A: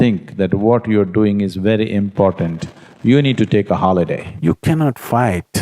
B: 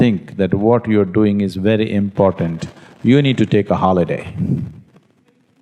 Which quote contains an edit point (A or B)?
A